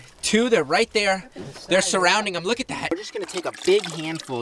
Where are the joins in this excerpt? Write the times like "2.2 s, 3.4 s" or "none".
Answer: 2.9 s

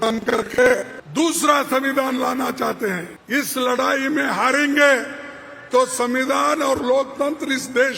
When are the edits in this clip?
1.0 s, 3.1 s

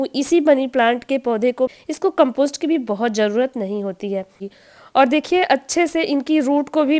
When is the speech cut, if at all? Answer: 1.7 s, 4.4 s

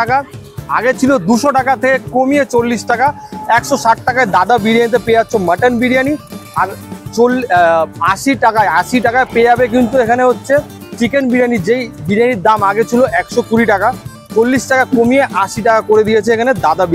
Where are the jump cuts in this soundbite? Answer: none

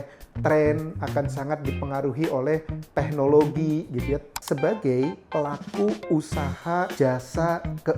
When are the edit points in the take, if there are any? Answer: 4.3 s, 6.9 s

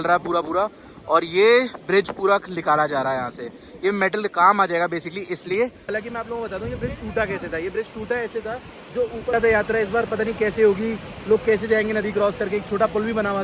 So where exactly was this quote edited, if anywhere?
5.8 s, 9.3 s

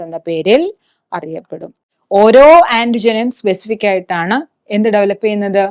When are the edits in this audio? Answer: 1.9 s

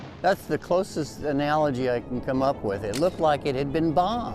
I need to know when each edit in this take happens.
none

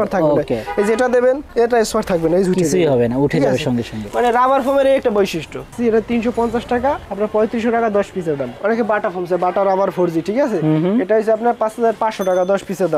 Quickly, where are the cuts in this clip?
5.7 s, 8.6 s

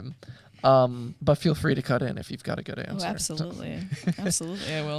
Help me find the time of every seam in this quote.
1.1 s

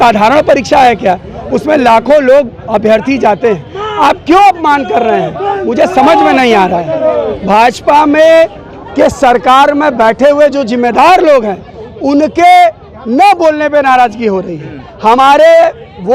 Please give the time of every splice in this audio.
7.3 s

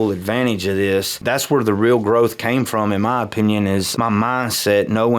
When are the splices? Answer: 1.2 s, 3.9 s

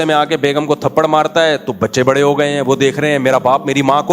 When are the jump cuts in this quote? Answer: none

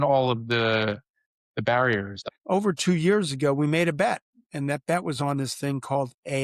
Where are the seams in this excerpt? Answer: 2.3 s

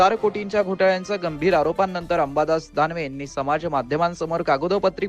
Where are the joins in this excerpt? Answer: none

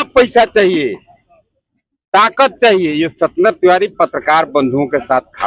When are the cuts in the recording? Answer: none

